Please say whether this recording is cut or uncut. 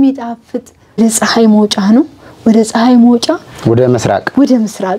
cut